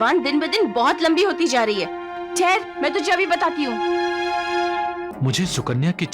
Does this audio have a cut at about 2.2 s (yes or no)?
no